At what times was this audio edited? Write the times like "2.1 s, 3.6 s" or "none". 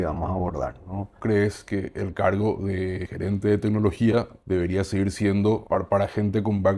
1.1 s, 3.1 s, 4.3 s, 5.6 s

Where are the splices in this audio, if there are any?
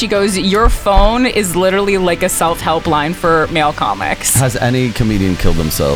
none

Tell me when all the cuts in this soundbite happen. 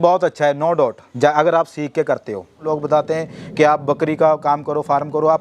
1.0 s, 2.6 s

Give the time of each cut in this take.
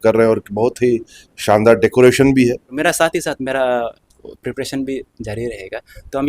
2.7 s

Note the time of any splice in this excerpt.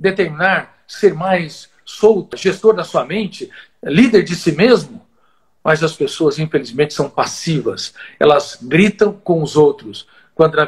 2.4 s

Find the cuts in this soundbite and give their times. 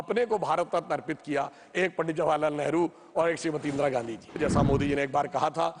4.4 s

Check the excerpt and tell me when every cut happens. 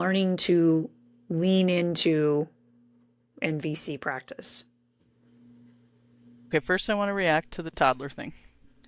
none

